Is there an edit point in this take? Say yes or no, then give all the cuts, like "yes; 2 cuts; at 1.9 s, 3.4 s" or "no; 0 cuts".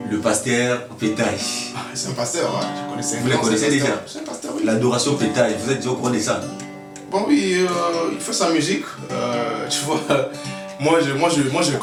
no; 0 cuts